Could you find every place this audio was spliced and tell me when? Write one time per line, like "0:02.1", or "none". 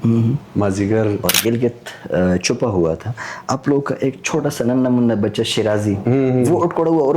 0:01.3